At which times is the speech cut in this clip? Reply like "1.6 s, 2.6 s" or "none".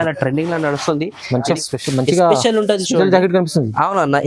1.5 s

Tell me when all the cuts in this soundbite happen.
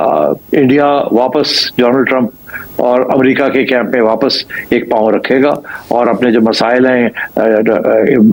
none

